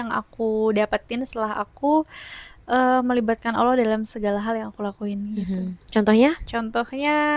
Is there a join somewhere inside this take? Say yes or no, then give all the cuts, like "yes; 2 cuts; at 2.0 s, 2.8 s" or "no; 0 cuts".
no; 0 cuts